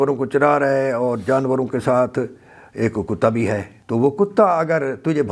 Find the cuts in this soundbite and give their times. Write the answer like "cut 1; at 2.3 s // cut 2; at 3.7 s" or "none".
cut 1; at 3.7 s

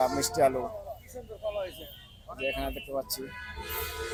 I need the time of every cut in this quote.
none

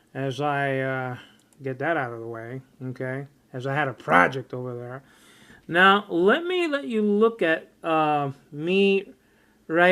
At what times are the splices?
cut 1; at 2.2 s

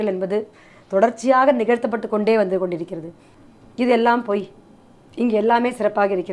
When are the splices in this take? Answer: cut 1; at 3.3 s

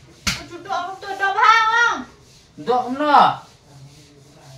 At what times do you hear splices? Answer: cut 1; at 2.1 s

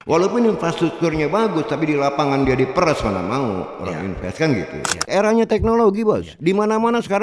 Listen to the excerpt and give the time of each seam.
cut 1; at 5.1 s

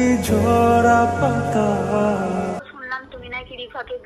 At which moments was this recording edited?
cut 1; at 2.6 s

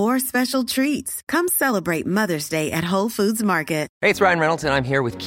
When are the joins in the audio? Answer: cut 1; at 3.9 s

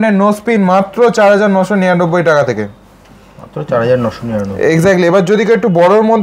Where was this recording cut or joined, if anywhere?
none

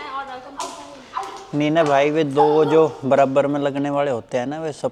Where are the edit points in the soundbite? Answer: none

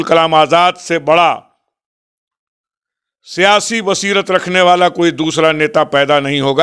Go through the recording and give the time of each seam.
none

